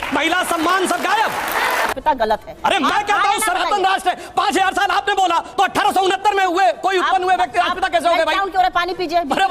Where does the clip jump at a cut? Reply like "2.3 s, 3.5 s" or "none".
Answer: 1.9 s